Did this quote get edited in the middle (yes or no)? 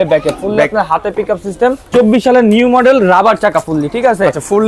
yes